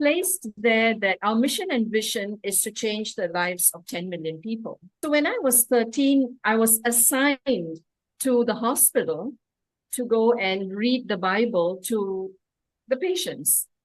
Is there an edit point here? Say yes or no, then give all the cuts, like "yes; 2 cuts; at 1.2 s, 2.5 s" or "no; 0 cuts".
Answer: yes; 1 cut; at 4.8 s